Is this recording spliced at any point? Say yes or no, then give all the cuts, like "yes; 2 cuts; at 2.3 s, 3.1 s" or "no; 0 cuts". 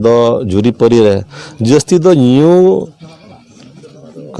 no; 0 cuts